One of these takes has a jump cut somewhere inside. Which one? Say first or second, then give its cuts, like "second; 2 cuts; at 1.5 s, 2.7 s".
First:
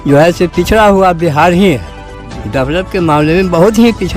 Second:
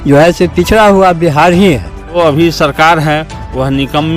second; 1 cut; at 2.2 s